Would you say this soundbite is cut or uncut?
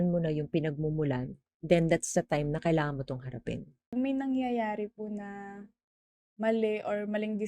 cut